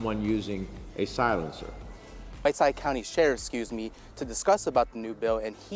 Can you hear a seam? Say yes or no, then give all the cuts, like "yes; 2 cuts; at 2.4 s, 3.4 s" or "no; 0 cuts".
no; 0 cuts